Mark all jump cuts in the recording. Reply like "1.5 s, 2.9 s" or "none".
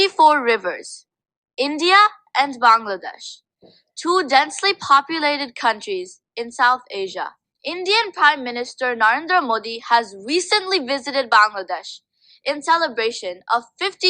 7.5 s